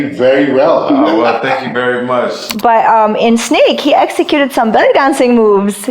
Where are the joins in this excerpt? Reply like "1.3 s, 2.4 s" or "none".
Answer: 2.4 s